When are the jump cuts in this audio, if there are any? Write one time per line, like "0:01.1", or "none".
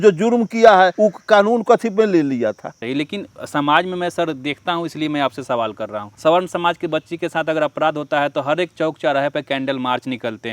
0:00.9
0:02.7
0:06.0

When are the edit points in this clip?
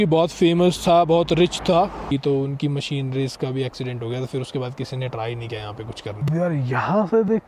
0:02.0
0:06.2

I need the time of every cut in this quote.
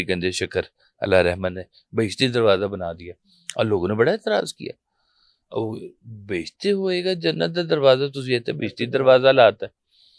none

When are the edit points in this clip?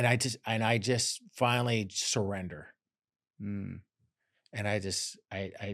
none

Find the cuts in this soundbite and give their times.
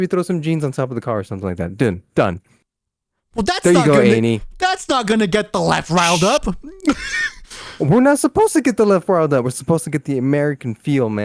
none

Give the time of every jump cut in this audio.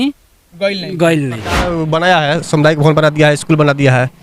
0:01.6

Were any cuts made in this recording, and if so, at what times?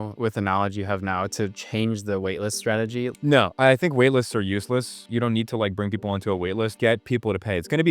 0:03.1
0:05.0
0:06.7

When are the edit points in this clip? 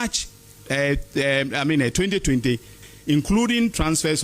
0:02.8

